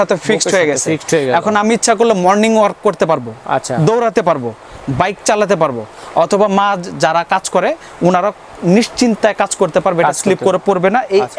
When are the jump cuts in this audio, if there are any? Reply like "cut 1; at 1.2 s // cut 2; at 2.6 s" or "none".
none